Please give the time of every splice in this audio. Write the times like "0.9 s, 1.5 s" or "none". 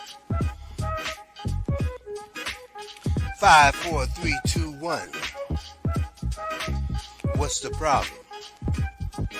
none